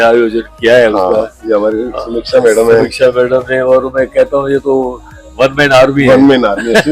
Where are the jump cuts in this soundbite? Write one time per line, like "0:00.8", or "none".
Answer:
none